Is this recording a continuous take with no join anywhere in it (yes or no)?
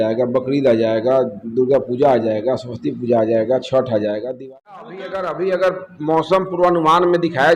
no